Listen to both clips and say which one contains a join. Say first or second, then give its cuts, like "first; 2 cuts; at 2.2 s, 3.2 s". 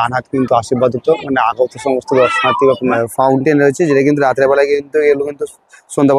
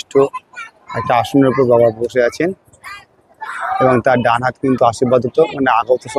first; 1 cut; at 3.0 s